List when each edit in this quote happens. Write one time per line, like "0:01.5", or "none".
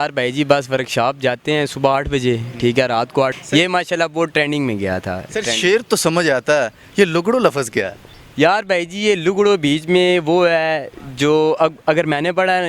0:03.4

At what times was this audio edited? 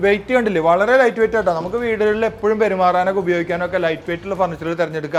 none

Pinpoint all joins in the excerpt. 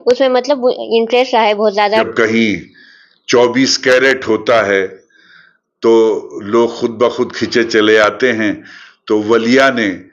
0:02.1

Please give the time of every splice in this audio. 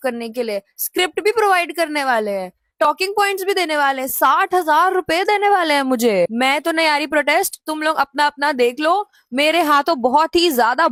none

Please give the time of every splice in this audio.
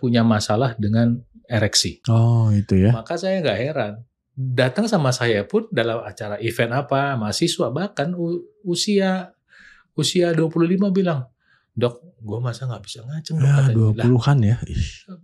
0:02.0

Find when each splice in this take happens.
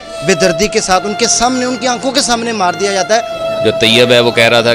0:03.6

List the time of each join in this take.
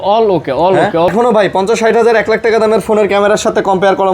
0:01.1

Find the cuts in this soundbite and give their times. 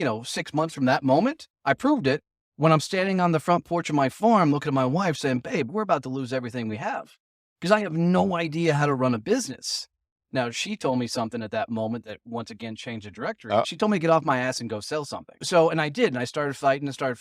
0:13.7
0:15.4

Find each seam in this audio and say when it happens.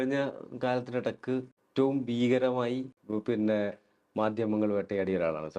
0:01.6
0:03.0

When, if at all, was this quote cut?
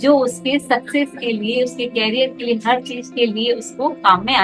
none

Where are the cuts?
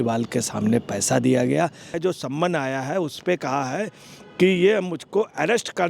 0:01.9

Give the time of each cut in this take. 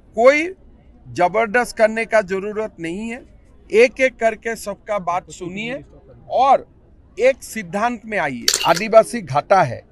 0:08.5

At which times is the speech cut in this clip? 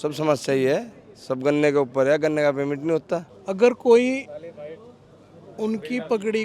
0:03.3

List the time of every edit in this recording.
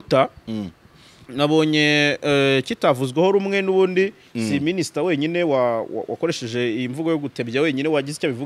none

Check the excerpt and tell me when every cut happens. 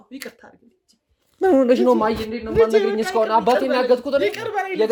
none

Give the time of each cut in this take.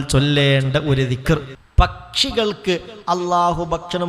0:01.6

